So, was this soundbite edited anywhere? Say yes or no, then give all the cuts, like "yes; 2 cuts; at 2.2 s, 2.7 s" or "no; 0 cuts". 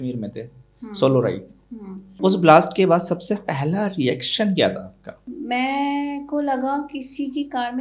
no; 0 cuts